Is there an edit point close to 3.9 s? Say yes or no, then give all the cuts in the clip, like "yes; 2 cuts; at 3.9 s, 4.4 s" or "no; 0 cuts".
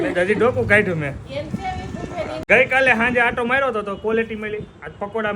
no; 1 cut; at 2.4 s